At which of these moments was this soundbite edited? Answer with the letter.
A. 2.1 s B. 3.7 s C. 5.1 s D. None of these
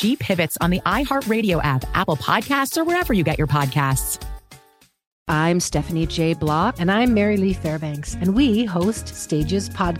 C